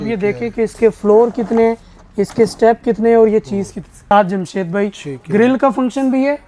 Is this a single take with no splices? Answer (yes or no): no